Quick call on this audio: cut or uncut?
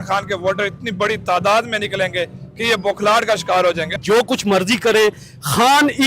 cut